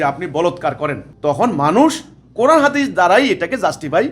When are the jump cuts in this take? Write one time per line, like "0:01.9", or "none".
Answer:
0:01.1